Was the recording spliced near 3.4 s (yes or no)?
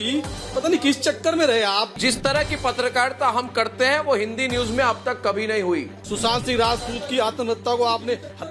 no